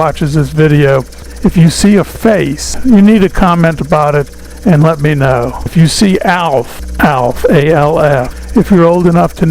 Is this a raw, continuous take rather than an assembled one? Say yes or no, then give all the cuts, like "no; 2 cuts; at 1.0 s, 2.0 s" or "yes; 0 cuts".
no; 5 cuts; at 1.2 s, 2.7 s, 5.6 s, 6.8 s, 8.4 s